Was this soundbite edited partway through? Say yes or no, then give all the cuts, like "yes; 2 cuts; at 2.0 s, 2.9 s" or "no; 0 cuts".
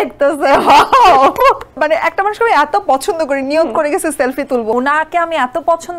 yes; 2 cuts; at 1.8 s, 4.7 s